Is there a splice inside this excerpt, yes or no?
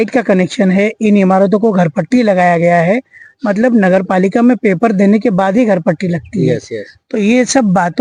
no